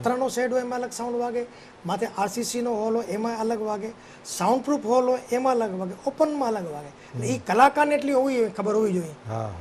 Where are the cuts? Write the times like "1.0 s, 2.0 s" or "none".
none